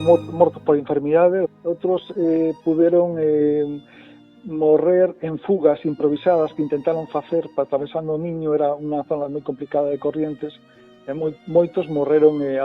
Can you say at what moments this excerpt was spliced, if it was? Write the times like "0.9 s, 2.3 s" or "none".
1.6 s